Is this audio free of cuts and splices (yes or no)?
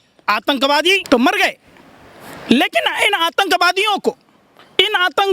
no